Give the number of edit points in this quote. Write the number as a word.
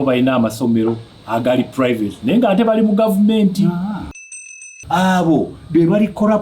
one